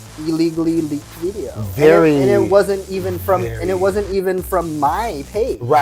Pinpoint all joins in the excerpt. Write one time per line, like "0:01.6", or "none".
none

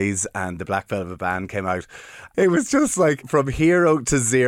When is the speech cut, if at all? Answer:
0:02.2
0:03.2

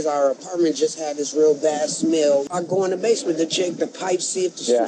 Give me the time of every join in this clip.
0:02.5

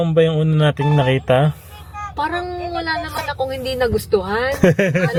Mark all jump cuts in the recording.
none

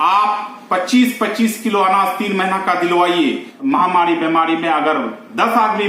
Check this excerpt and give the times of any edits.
0:03.5

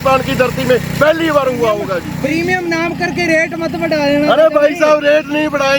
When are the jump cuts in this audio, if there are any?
0:02.1

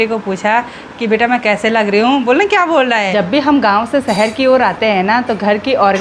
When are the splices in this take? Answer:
0:03.1

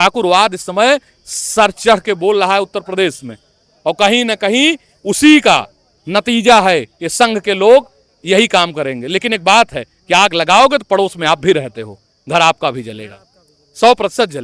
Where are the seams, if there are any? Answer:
none

